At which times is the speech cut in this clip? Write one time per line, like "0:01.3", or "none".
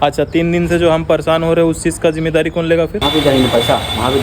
0:03.0